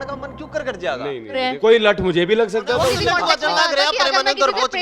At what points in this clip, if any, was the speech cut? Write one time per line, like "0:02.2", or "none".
0:01.5
0:03.0